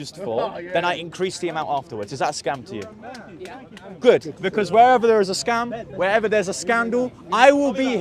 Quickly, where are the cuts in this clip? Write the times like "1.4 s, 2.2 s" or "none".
4.4 s